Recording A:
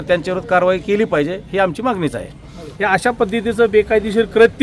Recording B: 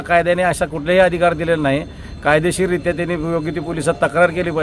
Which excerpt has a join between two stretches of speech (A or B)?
A